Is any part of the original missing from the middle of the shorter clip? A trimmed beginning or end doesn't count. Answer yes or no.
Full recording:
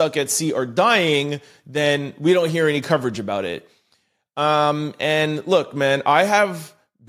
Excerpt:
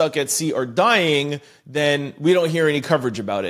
no